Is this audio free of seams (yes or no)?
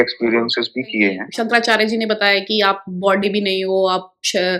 no